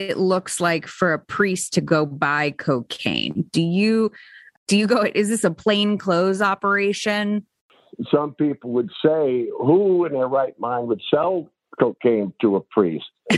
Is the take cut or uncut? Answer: cut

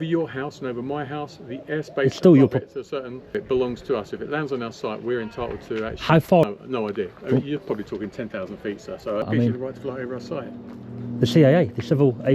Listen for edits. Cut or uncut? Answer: cut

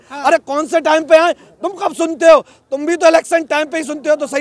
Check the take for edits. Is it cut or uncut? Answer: uncut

